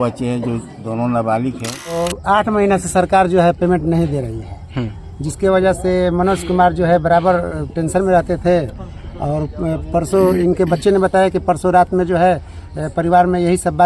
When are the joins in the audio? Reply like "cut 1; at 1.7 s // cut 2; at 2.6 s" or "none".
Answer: cut 1; at 2.0 s